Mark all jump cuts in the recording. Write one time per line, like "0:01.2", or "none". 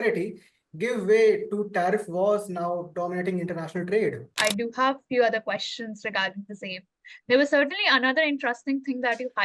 0:04.3